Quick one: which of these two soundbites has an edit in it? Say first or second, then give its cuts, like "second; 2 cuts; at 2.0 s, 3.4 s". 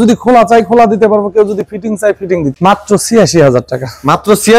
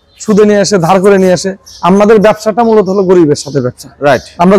first; 1 cut; at 2.5 s